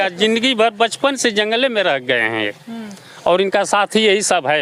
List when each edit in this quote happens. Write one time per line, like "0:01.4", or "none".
none